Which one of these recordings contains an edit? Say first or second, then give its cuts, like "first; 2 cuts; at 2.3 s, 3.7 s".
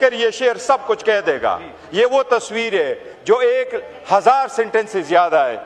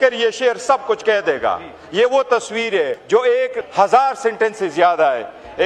second; 2 cuts; at 3.0 s, 3.6 s